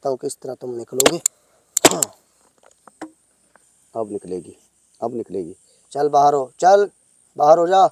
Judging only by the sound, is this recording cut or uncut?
cut